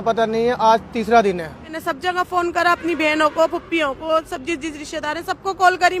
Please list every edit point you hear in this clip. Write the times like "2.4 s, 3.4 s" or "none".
1.7 s